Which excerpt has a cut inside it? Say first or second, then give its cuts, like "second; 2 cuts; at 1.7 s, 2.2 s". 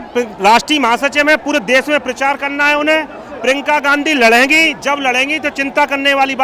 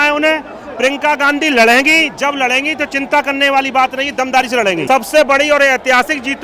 second; 1 cut; at 4.8 s